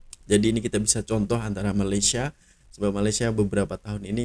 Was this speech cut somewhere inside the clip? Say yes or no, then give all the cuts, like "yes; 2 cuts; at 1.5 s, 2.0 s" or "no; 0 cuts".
no; 0 cuts